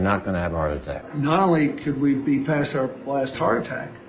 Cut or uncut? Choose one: cut